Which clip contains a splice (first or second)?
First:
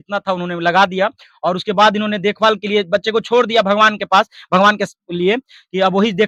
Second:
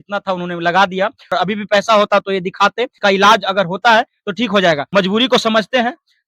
second